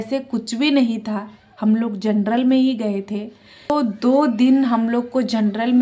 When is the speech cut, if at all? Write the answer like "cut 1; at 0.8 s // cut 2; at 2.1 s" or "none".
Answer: cut 1; at 3.7 s